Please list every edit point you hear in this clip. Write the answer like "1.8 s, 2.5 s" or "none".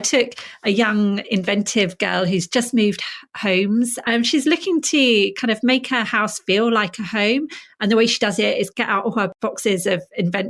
4.0 s, 9.3 s